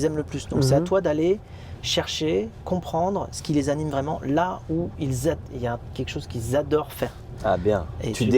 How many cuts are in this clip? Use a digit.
0